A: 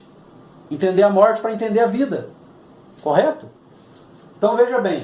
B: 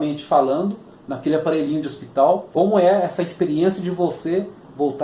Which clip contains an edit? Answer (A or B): B